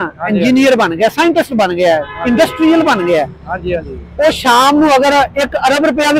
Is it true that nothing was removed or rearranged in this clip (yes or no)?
yes